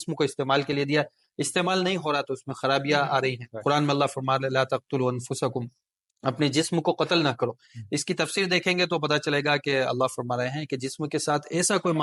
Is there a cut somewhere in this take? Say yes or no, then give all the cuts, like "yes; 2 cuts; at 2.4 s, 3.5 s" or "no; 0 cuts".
no; 0 cuts